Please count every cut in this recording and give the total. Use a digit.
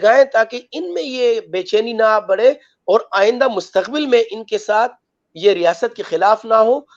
0